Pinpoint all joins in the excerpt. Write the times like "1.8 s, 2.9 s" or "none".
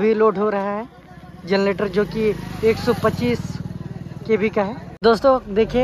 4.9 s